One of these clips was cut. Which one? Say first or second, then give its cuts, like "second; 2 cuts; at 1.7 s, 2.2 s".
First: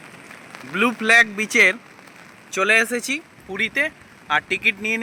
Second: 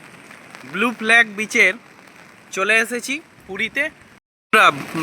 second; 1 cut; at 4.1 s